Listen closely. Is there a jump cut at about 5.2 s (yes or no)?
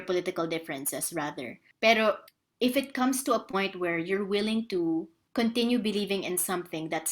yes